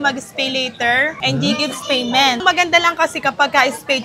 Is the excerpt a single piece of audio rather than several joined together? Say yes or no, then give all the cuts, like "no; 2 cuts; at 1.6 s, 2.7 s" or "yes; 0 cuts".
no; 2 cuts; at 1.2 s, 2.4 s